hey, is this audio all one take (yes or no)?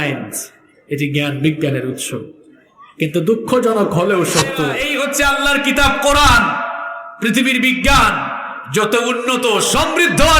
no